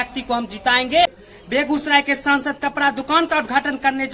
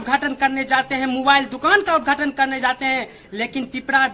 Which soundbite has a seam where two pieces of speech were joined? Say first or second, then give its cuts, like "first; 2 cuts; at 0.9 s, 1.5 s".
first; 1 cut; at 1.1 s